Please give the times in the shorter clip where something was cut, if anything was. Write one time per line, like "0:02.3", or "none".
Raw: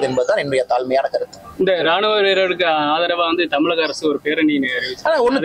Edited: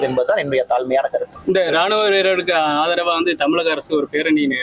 0:01.3